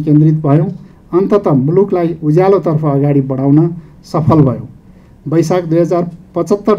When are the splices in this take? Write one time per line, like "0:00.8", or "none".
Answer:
none